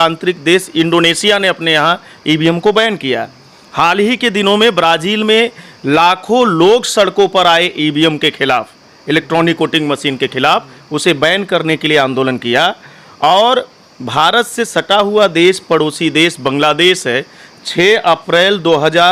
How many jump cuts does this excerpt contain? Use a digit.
0